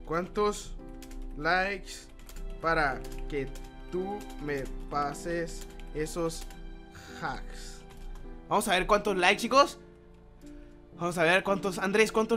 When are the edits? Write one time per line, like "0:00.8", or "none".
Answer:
none